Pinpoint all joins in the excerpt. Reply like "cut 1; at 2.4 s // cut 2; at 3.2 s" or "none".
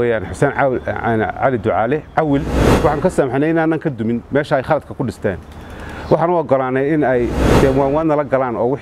cut 1; at 7.4 s